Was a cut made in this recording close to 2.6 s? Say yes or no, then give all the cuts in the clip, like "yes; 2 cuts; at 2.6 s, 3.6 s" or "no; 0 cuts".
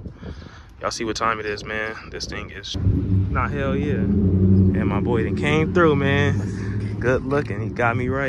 yes; 1 cut; at 2.6 s